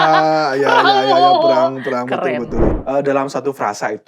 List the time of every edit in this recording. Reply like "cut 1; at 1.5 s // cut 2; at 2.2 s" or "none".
cut 1; at 2.7 s